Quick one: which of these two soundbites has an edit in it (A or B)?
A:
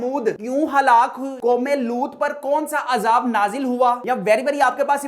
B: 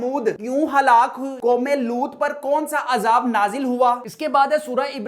A